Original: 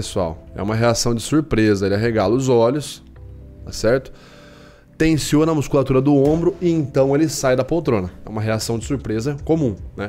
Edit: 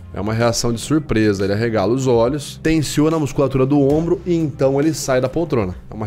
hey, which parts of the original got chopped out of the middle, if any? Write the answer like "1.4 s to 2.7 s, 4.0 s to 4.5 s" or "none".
2.9 s to 4.8 s